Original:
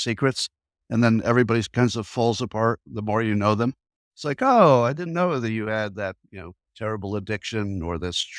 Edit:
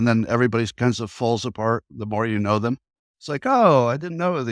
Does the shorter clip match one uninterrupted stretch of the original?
yes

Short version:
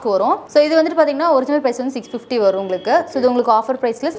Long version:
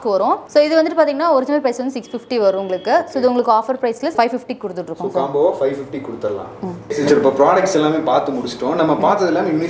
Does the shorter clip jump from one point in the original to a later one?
no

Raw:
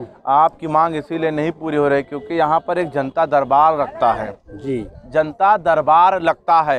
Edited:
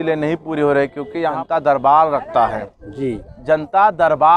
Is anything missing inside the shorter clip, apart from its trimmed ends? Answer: yes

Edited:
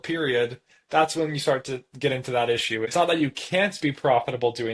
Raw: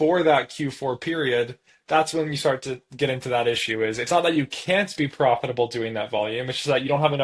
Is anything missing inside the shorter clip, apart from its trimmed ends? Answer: yes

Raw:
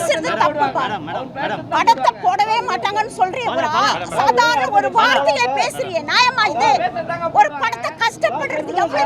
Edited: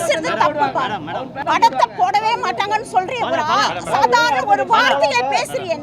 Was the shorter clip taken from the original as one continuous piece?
no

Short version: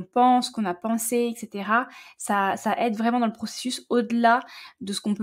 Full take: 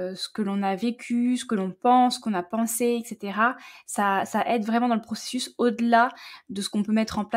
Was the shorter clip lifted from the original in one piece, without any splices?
yes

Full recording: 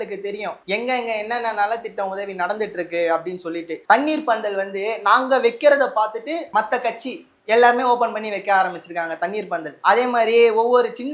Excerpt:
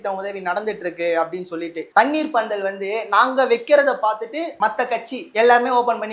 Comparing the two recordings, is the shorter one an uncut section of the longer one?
no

